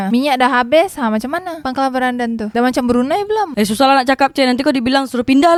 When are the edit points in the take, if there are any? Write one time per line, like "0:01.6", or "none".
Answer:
none